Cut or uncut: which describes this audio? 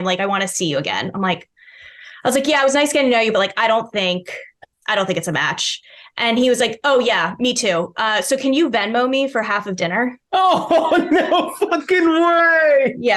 uncut